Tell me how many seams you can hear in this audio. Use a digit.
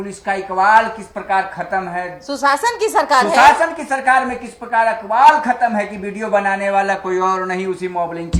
0